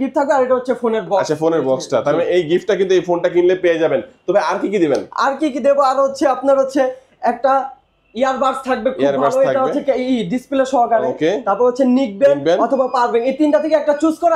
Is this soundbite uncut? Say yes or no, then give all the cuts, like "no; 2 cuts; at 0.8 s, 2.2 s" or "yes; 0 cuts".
yes; 0 cuts